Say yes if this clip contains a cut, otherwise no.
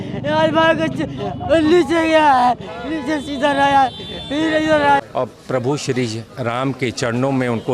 yes